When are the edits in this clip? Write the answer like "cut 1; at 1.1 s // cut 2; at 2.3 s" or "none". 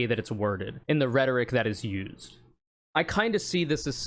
cut 1; at 2.8 s